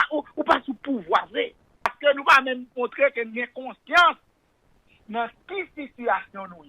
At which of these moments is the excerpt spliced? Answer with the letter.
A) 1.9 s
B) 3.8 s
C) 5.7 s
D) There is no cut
A